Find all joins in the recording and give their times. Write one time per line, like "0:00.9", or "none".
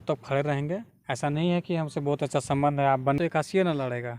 0:03.2